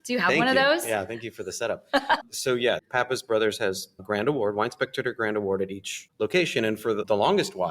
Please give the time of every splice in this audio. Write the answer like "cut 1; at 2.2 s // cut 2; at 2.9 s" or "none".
cut 1; at 2.8 s // cut 2; at 4.0 s

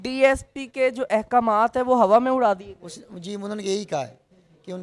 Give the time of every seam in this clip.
none

